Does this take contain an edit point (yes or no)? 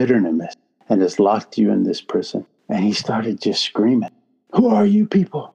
yes